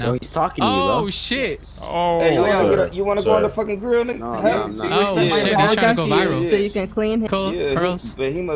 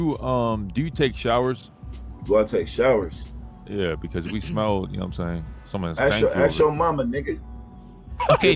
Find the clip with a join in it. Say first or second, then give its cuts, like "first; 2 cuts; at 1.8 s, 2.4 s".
first; 1 cut; at 7.3 s